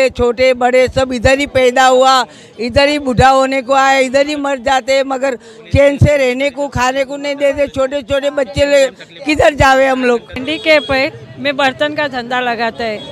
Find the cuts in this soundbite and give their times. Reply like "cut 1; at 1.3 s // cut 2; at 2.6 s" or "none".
cut 1; at 10.3 s